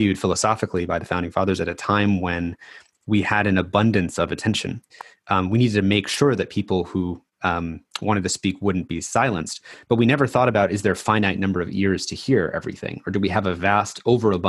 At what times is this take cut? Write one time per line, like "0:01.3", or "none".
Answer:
none